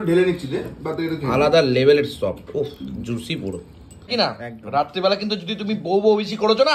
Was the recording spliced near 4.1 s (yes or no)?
yes